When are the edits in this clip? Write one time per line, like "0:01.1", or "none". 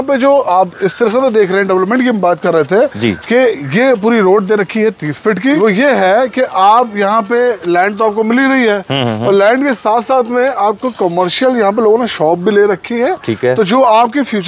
0:05.6